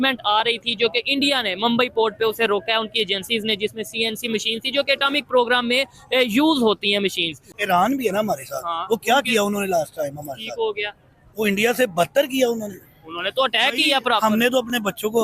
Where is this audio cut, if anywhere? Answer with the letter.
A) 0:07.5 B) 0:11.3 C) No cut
A